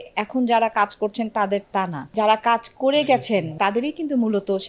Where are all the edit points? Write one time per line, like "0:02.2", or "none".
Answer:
0:02.1
0:03.5